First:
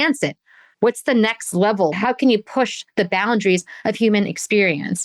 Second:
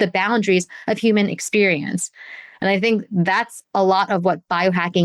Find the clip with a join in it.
first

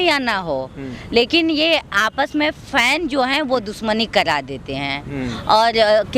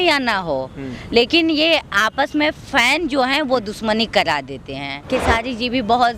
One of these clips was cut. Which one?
second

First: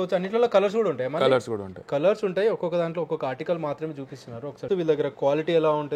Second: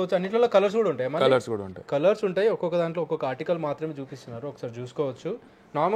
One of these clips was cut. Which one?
first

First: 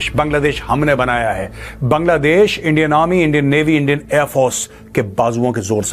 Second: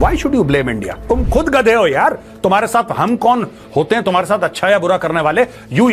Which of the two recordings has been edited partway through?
second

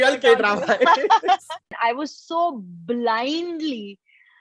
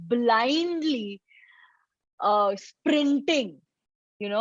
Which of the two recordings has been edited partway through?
first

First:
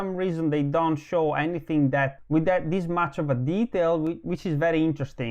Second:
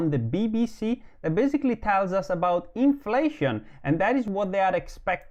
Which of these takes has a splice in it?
first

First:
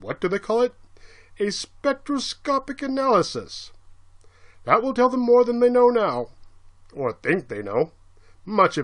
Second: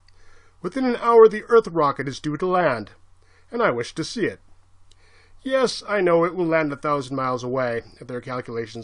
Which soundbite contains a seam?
second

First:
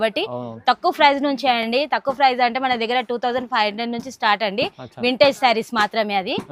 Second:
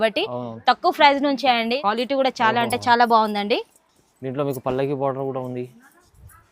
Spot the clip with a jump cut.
second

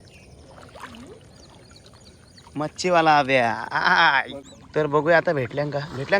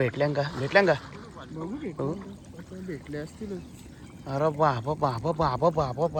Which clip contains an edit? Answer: first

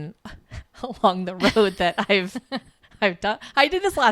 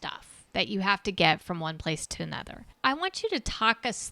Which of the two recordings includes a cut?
second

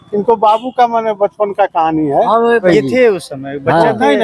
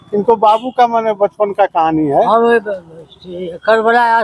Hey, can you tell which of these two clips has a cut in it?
first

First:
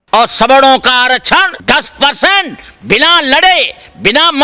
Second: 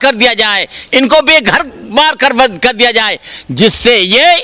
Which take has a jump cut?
first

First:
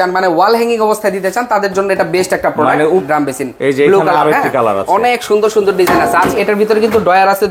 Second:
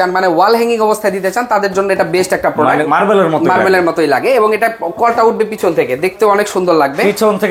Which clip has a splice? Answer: first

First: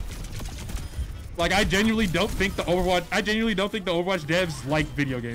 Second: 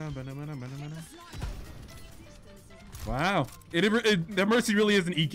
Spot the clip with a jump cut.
second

